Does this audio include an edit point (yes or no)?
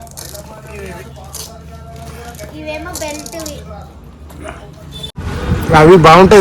yes